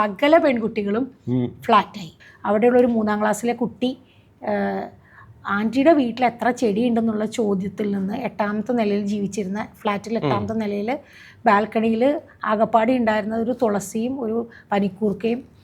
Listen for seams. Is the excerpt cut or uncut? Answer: cut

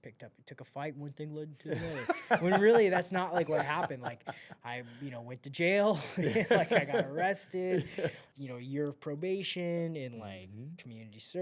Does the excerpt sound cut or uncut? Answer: cut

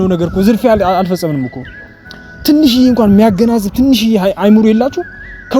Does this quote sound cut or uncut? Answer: uncut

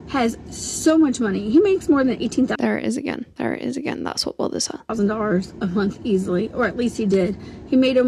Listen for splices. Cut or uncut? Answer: uncut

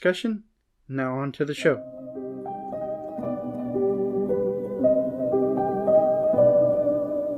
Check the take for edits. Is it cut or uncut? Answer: cut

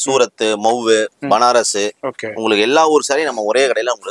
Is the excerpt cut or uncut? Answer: uncut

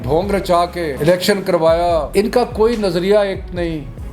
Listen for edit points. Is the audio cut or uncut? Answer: cut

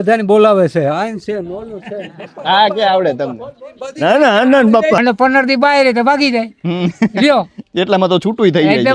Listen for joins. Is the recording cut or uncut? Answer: cut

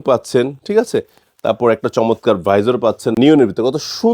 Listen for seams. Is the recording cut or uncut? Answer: cut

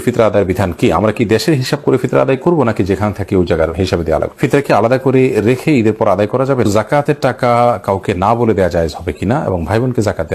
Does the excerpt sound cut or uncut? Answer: cut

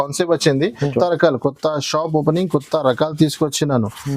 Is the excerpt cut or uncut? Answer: cut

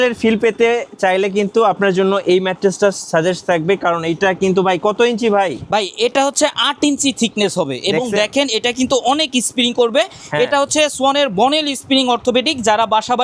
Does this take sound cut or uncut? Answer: uncut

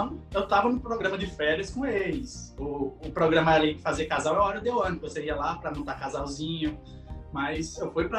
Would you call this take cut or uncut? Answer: uncut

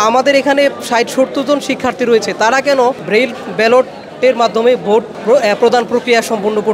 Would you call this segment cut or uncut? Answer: cut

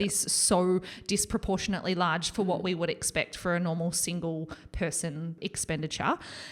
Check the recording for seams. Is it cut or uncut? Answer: cut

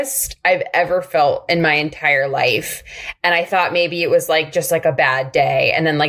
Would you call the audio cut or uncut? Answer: uncut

